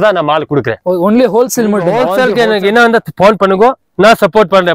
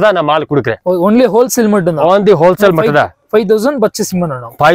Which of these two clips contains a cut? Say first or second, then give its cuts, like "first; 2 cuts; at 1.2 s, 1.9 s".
first; 1 cut; at 2.1 s